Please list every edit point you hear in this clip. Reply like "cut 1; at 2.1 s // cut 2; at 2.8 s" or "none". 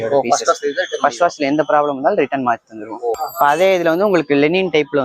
none